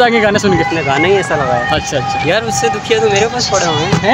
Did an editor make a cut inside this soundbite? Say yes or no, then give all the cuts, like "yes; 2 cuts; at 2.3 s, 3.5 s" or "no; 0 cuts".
no; 0 cuts